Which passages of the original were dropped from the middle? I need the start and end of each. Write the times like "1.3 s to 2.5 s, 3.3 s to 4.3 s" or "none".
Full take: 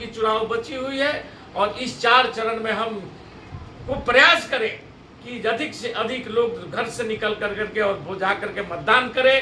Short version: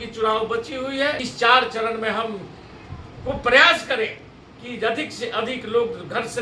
1.3 s to 1.9 s